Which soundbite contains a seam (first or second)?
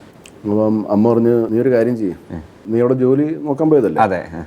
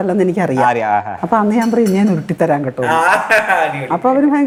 first